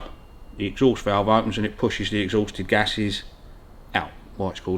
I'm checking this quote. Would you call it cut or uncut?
uncut